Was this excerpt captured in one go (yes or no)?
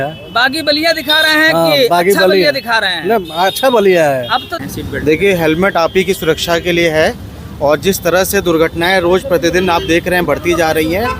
no